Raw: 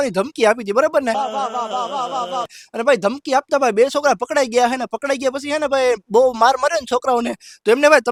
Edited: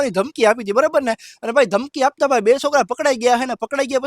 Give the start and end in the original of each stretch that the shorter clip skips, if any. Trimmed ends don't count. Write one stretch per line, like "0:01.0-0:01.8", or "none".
0:01.2-0:02.5

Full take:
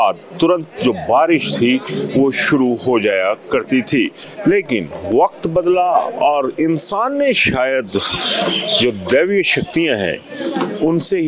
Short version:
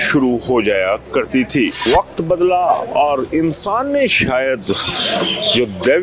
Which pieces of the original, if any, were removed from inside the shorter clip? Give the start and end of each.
0:04.1-0:05.0

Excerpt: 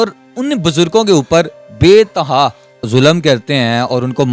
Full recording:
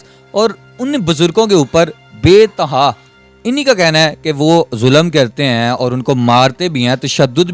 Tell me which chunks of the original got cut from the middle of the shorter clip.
0:03.3-0:04.7

